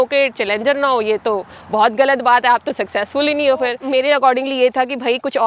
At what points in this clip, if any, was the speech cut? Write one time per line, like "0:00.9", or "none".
0:03.8